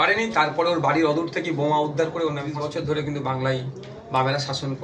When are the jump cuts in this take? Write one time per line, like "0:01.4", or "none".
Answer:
0:02.5